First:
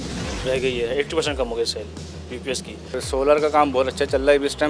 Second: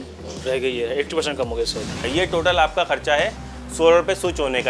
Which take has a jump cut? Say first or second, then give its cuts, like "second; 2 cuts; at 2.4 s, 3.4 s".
second; 1 cut; at 2.0 s